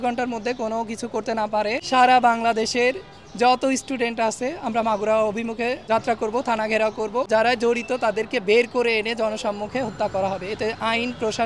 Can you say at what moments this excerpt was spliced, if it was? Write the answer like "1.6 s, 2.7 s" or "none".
1.8 s, 5.8 s, 7.3 s